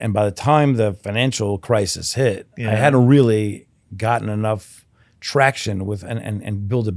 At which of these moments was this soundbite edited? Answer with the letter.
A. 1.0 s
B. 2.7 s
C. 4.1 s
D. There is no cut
A